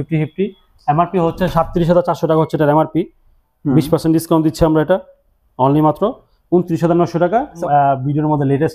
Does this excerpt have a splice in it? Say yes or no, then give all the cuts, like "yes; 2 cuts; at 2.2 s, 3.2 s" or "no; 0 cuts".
yes; 1 cut; at 7.6 s